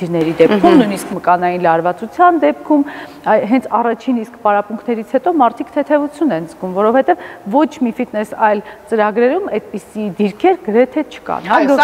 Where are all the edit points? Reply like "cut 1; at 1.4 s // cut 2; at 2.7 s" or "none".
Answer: none